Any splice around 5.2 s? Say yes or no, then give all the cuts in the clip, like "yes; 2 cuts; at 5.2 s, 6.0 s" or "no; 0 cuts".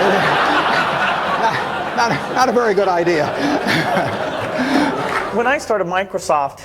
yes; 1 cut; at 5.2 s